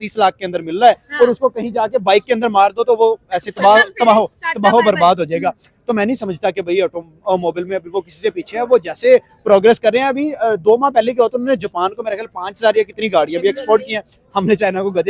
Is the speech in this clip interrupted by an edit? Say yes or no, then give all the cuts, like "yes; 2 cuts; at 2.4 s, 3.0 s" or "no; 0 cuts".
no; 0 cuts